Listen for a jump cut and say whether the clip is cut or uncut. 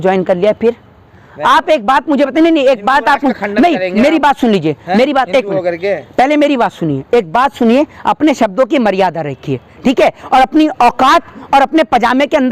uncut